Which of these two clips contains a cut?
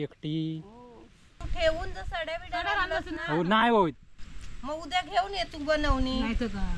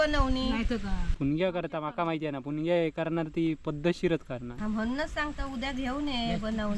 first; 1 cut; at 1.4 s

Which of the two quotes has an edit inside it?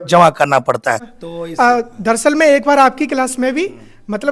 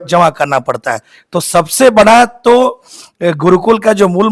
first; 1 cut; at 1.1 s

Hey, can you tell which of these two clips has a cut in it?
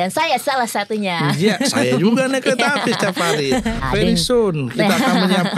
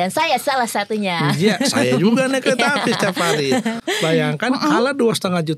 first; 1 cut; at 3.8 s

